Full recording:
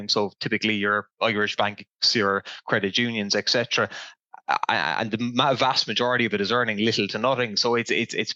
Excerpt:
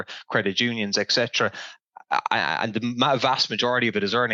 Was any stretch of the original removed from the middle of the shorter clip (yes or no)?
no